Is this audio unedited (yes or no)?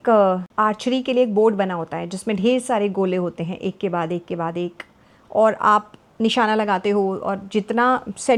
yes